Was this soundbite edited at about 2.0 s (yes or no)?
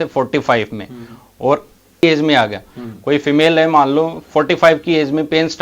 yes